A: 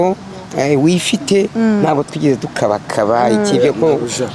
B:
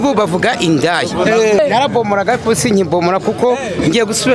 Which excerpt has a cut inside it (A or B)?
B